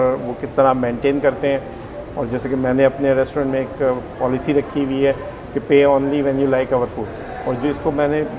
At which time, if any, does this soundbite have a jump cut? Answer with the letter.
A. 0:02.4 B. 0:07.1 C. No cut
C